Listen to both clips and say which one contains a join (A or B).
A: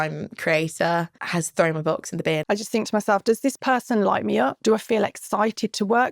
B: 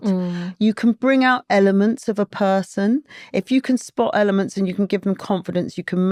A